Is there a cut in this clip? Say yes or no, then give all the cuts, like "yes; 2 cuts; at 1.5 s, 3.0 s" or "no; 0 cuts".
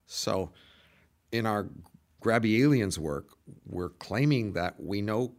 no; 0 cuts